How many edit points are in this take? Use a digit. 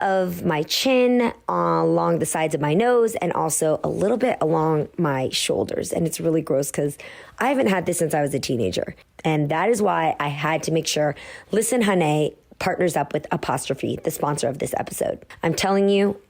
2